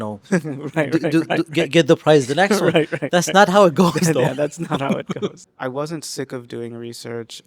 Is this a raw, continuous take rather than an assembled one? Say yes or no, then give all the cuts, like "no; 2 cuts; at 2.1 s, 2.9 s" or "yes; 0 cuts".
no; 1 cut; at 5.4 s